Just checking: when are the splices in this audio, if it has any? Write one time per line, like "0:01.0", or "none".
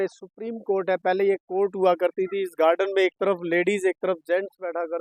none

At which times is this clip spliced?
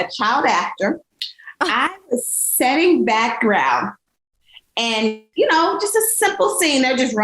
0:05.3

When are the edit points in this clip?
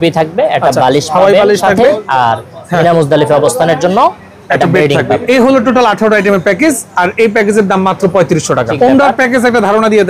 0:08.7

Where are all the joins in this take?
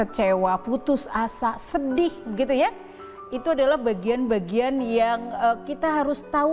none

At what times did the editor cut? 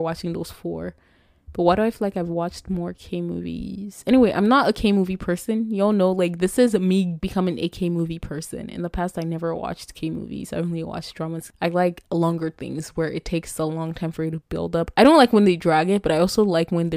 0:11.4

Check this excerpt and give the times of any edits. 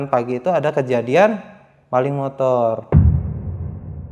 0:02.8

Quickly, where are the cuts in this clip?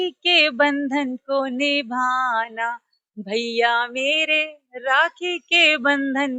none

